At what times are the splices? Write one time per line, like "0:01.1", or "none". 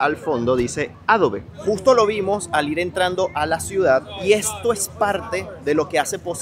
none

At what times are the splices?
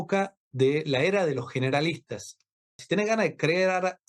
0:02.8

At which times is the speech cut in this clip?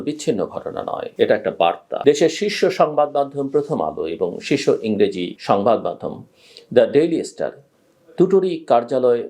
0:01.0
0:01.9

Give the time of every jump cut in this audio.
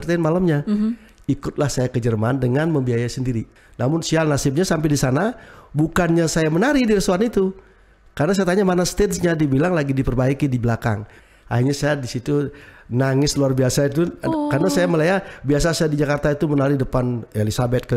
0:03.6
0:11.1

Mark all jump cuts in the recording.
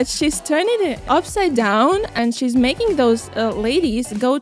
0:01.0
0:02.1

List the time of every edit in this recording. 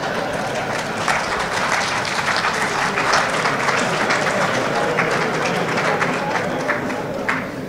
none

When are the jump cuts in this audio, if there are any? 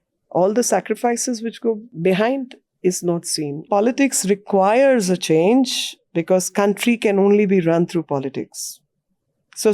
0:01.9
0:03.6

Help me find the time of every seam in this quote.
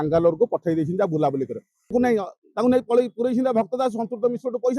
0:01.9

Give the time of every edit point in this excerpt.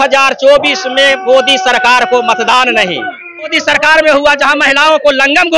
0:03.6

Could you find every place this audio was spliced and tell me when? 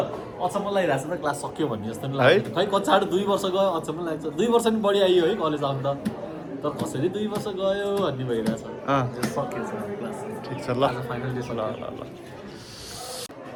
none

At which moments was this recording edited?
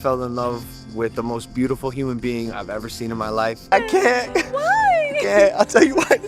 0:03.6

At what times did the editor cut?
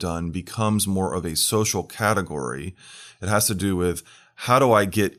none

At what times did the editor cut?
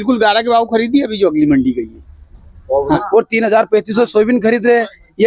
0:03.0

